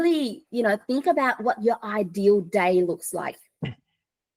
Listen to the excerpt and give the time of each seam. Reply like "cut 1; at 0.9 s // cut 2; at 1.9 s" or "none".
none

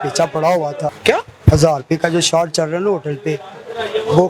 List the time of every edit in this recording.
cut 1; at 1.0 s

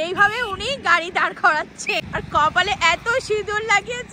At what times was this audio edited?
cut 1; at 2.1 s

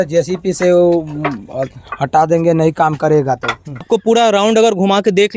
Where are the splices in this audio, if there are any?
cut 1; at 3.8 s

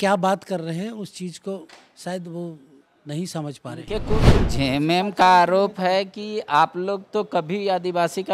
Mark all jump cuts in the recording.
cut 1; at 4.1 s

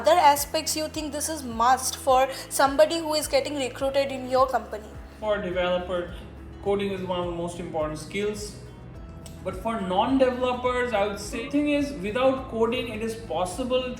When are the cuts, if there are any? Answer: cut 1; at 5.1 s // cut 2; at 11.4 s

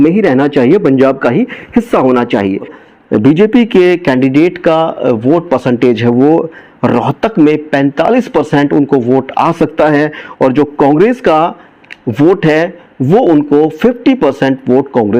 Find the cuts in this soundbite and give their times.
cut 1; at 2.7 s

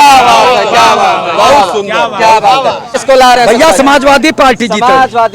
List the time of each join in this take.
cut 1; at 2.9 s

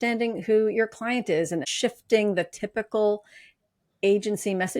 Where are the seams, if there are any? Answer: cut 1; at 1.7 s

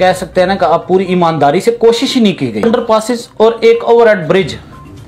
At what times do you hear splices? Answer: cut 1; at 2.6 s

